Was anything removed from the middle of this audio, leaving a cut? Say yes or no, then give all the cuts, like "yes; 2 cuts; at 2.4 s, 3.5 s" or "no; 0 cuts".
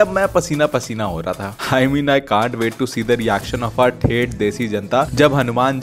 yes; 1 cut; at 1.5 s